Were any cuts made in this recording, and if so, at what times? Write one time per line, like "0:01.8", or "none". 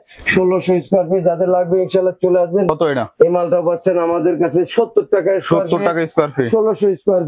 0:02.7